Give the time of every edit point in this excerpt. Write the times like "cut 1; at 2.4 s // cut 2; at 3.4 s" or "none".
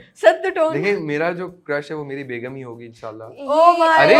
none